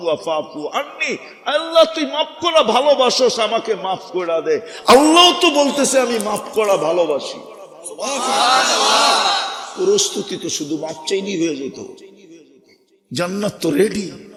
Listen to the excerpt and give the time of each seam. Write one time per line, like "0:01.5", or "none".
none